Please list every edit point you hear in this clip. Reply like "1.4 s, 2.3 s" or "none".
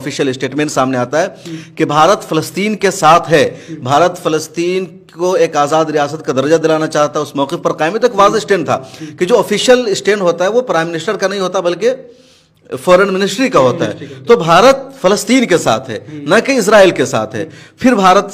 none